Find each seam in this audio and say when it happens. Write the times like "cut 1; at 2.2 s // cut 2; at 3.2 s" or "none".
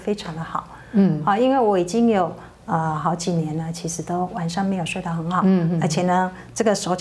none

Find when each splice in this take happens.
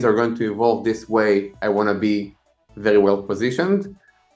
none

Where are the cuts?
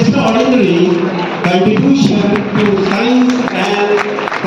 none

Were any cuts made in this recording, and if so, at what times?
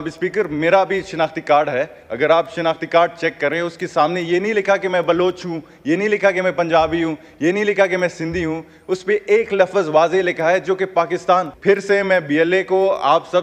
cut 1; at 11.5 s

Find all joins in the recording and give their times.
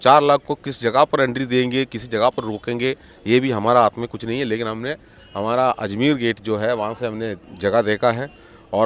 none

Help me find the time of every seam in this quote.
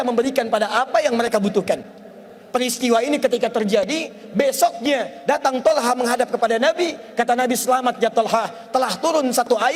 none

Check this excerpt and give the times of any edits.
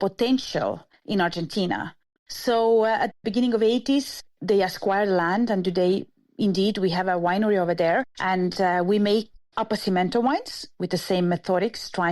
cut 1; at 0.9 s // cut 2; at 2.1 s

